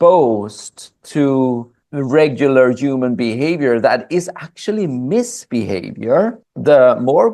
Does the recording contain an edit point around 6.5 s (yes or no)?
yes